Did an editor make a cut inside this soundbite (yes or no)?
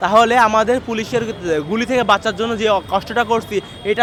no